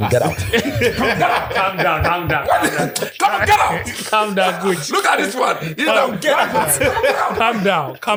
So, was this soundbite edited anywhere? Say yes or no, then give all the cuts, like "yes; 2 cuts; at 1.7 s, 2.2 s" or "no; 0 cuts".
no; 0 cuts